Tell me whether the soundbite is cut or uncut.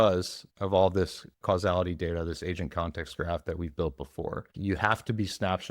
cut